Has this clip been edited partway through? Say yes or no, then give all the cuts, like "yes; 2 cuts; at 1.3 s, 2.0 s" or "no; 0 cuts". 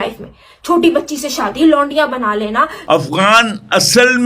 yes; 1 cut; at 2.8 s